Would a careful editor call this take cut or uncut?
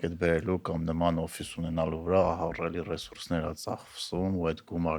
uncut